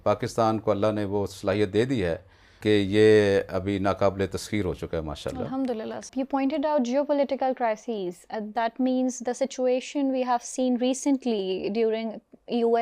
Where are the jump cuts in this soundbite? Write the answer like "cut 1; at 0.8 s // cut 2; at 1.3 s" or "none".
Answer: cut 1; at 6.1 s